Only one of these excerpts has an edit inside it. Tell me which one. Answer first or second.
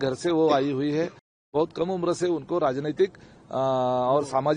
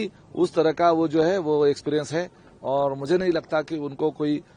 first